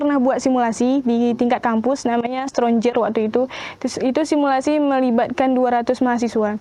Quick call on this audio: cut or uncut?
uncut